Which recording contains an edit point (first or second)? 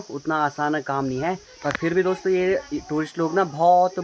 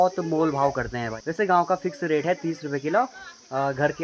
second